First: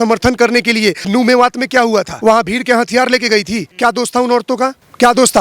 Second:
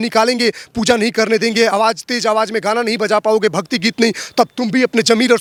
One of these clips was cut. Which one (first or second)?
first